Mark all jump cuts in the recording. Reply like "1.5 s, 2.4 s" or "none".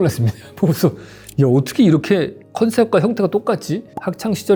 none